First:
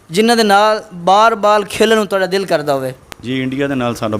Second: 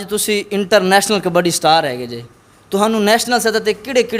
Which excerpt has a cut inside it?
first; 1 cut; at 3.1 s

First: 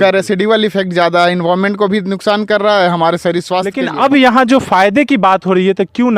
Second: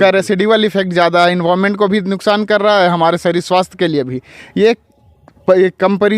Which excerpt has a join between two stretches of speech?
first; 1 cut; at 3.8 s

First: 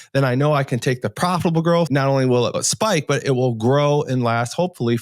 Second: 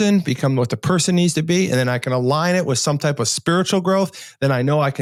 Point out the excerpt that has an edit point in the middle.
first; 2 cuts; at 1.9 s, 2.7 s

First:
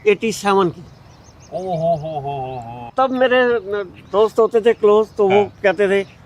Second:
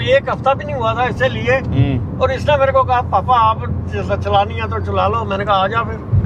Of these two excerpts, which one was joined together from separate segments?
first; 1 cut; at 2.9 s

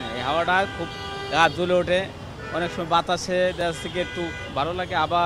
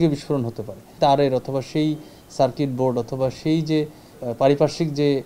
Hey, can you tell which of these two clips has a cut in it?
second; 2 cuts; at 0.9 s, 4.1 s

